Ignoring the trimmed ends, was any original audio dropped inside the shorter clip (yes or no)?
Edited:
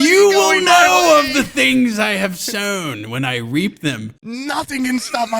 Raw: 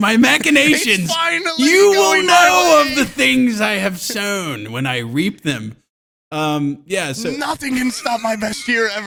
yes